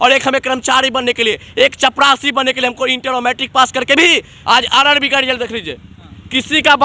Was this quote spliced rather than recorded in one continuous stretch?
yes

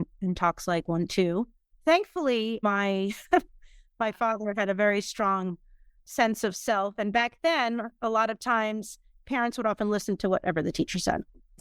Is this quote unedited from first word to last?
yes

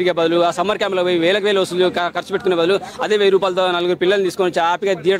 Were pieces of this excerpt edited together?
no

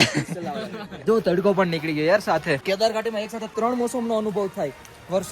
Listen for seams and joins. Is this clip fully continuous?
no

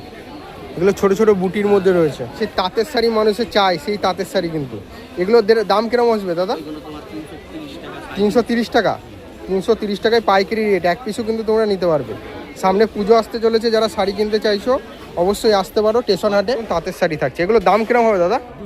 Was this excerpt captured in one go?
no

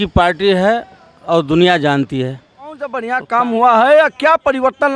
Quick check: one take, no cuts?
no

